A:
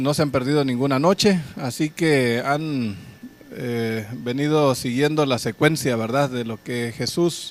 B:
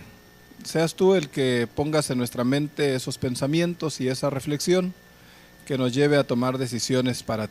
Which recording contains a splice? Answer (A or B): B